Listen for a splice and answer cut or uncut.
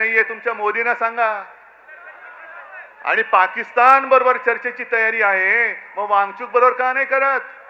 uncut